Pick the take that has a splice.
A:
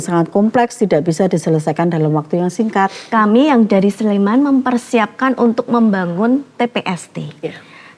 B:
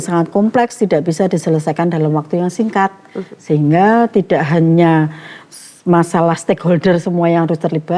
A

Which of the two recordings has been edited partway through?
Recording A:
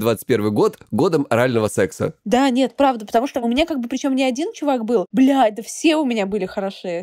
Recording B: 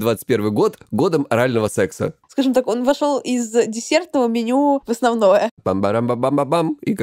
B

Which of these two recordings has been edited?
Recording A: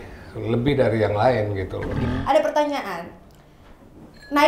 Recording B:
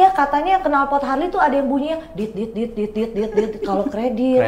A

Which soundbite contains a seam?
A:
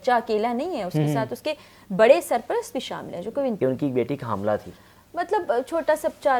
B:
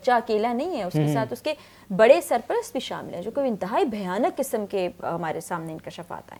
A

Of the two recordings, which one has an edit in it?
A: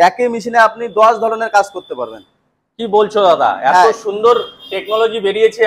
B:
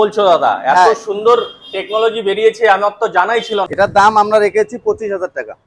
B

